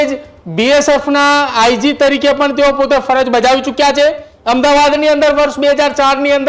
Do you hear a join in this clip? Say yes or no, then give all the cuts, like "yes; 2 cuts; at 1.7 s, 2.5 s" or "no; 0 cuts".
yes; 1 cut; at 4.3 s